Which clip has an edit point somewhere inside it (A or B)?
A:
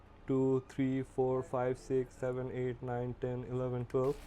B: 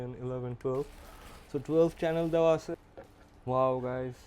B